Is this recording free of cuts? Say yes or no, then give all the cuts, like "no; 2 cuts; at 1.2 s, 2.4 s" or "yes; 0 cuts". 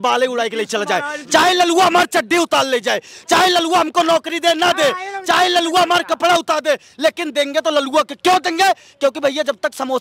yes; 0 cuts